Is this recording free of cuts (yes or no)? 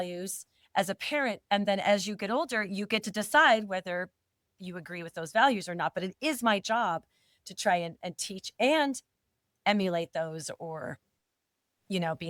yes